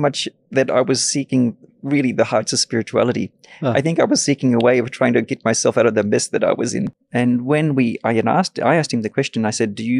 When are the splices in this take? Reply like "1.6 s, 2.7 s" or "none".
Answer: 6.9 s